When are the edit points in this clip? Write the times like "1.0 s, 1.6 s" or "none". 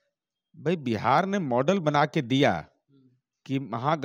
none